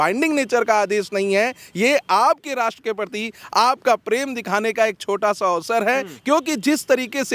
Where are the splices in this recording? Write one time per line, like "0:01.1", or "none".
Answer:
none